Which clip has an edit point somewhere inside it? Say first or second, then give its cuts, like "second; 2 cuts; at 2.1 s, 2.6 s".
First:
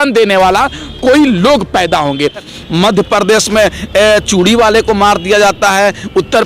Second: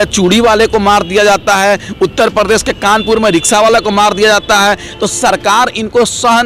first; 1 cut; at 2.5 s